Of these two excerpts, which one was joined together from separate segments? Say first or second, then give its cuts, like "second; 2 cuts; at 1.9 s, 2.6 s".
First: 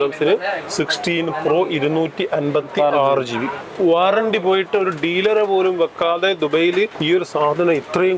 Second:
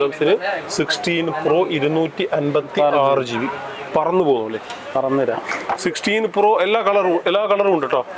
first; 2 cuts; at 3.6 s, 7.0 s